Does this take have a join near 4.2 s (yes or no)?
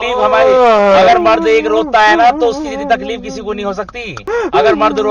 no